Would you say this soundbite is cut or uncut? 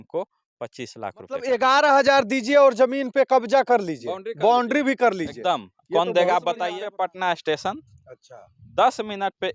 cut